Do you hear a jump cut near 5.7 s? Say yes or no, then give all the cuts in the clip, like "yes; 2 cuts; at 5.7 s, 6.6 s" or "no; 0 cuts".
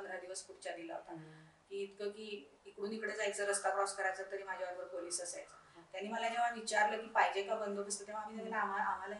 no; 0 cuts